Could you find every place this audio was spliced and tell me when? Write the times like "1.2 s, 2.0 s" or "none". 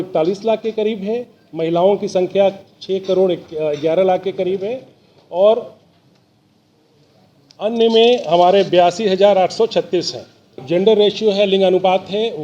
10.6 s